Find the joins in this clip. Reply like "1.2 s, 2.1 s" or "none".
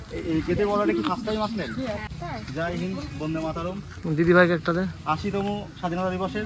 2.1 s